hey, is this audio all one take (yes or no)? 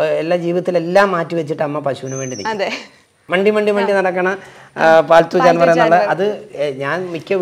no